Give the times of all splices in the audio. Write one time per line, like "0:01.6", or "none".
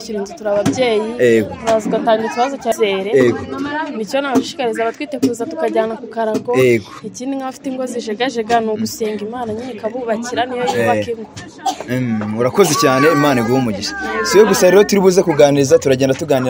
0:02.7